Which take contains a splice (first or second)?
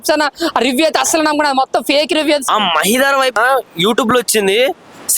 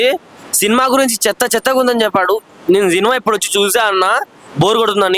first